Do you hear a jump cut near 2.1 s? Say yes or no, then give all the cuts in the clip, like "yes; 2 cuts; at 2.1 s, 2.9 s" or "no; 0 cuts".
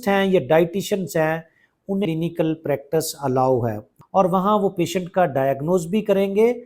yes; 2 cuts; at 2.1 s, 3.9 s